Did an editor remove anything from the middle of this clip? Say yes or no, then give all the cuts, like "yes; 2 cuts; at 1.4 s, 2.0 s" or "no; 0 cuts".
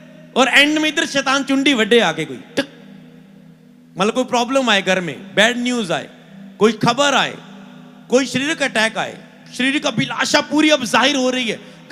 no; 0 cuts